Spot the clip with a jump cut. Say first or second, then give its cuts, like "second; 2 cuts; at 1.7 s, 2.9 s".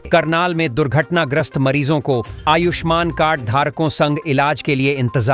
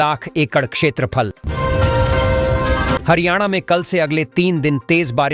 second; 2 cuts; at 1.4 s, 3.0 s